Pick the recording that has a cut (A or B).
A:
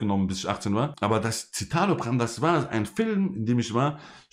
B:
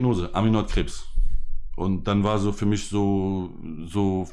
A